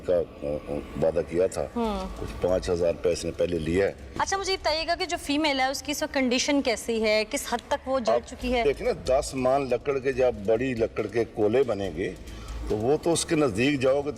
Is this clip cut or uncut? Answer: uncut